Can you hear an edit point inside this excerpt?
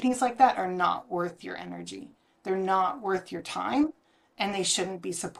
no; 0 cuts

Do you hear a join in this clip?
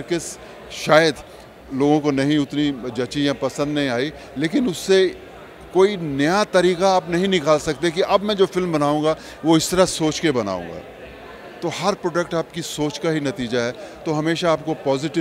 no; 0 cuts

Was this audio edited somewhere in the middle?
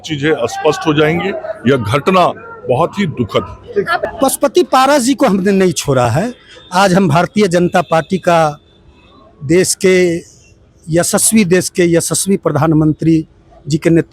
yes; 1 cut; at 4.0 s

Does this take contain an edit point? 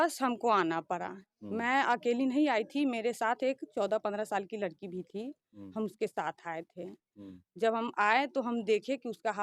no; 0 cuts

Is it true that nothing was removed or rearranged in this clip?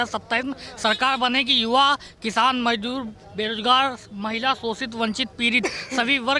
yes; 0 cuts

